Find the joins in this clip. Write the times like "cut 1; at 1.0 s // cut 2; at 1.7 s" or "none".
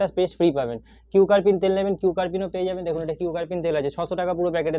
none